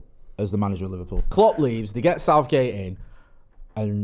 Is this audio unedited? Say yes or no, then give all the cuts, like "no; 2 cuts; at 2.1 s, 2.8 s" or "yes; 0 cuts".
no; 1 cut; at 1.2 s